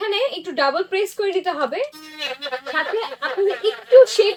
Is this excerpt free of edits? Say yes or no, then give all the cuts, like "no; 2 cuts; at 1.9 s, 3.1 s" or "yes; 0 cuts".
yes; 0 cuts